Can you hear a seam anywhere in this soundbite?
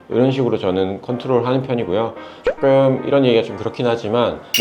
yes; 1 cut; at 2.3 s

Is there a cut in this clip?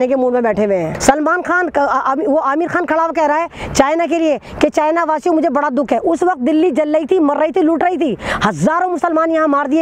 yes; 1 cut; at 0.9 s

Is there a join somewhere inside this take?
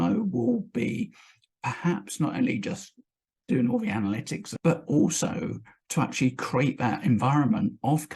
yes; 1 cut; at 4.5 s

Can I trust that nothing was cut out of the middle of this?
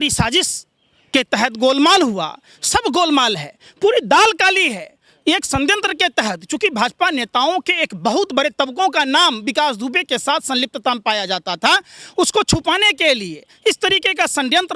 yes; 0 cuts

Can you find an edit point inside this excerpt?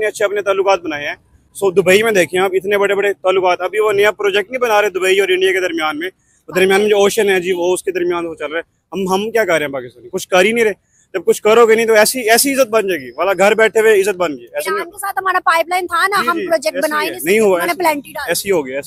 no; 0 cuts

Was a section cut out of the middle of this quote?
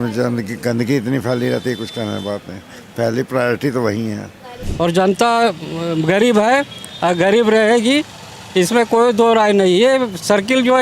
yes; 1 cut; at 4.6 s

